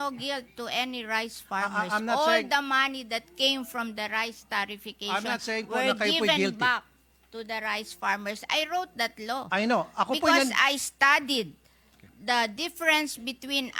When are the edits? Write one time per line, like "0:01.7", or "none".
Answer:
none